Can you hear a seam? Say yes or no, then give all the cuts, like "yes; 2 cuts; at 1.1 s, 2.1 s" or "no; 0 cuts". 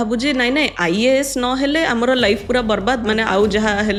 no; 0 cuts